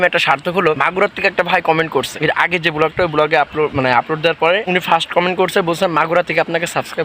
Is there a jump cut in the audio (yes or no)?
no